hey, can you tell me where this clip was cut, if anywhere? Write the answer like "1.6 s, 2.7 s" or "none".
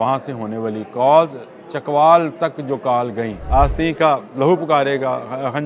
3.4 s